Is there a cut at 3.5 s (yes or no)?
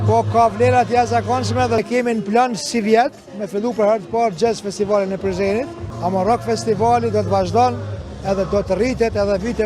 no